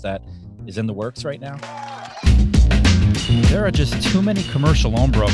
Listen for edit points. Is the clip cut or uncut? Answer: cut